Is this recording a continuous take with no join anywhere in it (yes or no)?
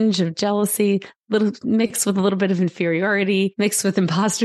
no